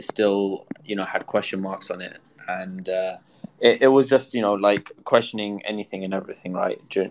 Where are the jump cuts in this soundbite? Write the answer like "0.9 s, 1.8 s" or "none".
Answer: none

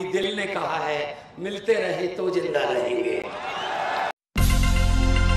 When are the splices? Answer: 4.1 s

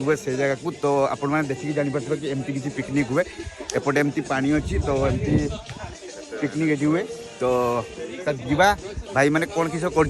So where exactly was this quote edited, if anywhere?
none

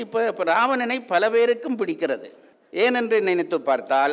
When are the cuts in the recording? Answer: none

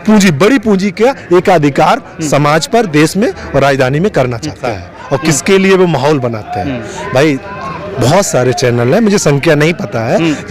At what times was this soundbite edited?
4.7 s

